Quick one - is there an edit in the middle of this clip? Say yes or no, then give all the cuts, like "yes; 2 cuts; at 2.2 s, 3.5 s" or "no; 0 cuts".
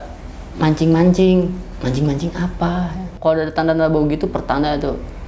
yes; 1 cut; at 3.1 s